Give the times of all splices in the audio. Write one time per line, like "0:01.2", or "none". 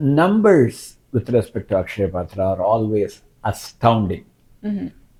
none